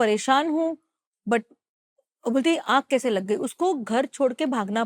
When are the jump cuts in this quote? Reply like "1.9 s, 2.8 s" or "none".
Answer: none